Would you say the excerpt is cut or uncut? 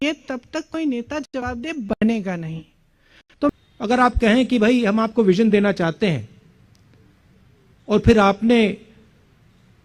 cut